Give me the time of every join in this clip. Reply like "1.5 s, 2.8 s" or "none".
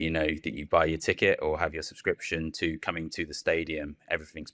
none